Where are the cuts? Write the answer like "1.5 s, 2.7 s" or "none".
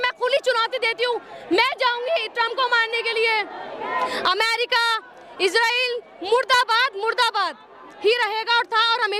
none